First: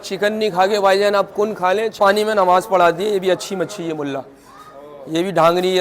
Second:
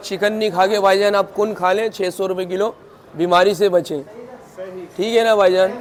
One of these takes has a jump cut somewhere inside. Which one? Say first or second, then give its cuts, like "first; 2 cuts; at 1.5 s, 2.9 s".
first; 1 cut; at 1.9 s